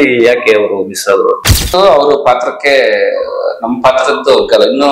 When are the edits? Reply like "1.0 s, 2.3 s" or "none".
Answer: 1.7 s